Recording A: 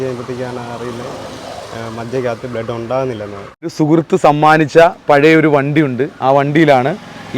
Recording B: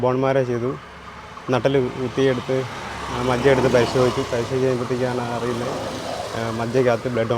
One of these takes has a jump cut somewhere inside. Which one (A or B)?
A